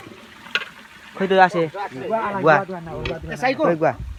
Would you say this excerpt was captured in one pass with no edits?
yes; 0 cuts

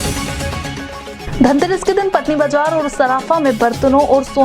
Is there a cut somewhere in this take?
yes; 1 cut; at 1.1 s

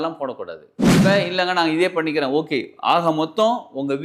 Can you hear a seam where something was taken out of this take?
yes; 1 cut; at 1.0 s

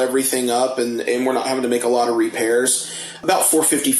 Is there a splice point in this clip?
no; 0 cuts

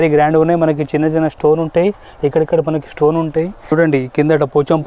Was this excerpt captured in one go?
no; 1 cut; at 3.7 s

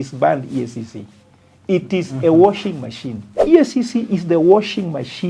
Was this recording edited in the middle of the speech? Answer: yes; 1 cut; at 3.4 s

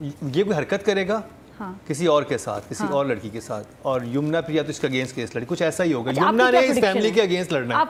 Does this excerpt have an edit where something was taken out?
no; 0 cuts

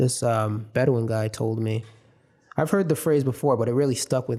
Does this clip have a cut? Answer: no; 0 cuts

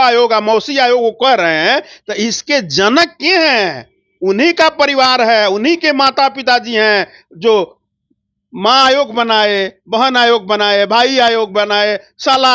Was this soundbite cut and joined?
no; 0 cuts

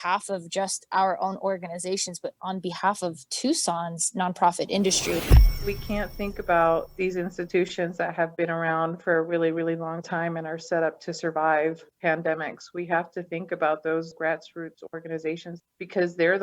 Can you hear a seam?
yes; 2 cuts; at 5.4 s, 15.5 s

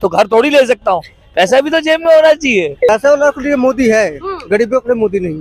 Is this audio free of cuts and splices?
no; 1 cut; at 2.9 s

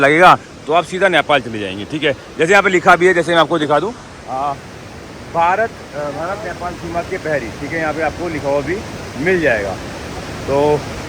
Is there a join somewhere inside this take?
no; 0 cuts

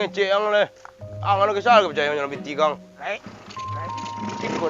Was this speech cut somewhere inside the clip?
no; 0 cuts

